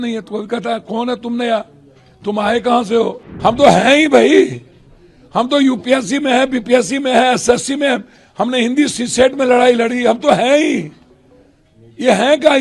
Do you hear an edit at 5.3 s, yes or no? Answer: no